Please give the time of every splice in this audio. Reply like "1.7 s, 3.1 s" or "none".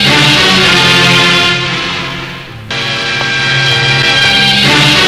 2.7 s